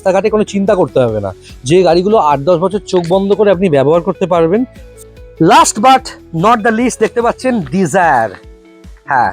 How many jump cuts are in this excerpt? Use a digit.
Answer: 1